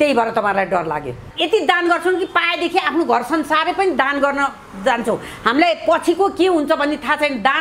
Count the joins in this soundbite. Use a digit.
1